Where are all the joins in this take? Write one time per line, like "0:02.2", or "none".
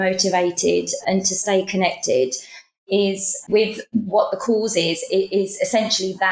0:01.0